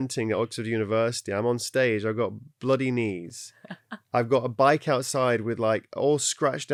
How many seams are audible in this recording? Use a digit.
0